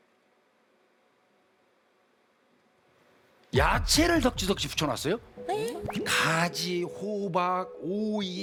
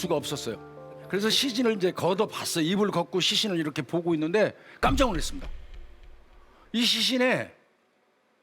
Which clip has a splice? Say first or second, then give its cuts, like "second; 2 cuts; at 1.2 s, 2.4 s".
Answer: second; 1 cut; at 1.0 s